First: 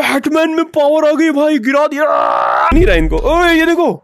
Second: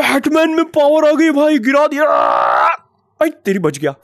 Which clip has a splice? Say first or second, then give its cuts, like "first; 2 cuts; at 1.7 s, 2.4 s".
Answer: first; 1 cut; at 2.7 s